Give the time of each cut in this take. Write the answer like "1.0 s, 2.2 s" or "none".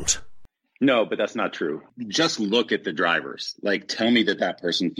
1.9 s